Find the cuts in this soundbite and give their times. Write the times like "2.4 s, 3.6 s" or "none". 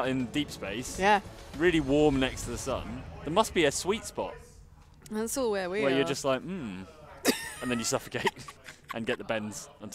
none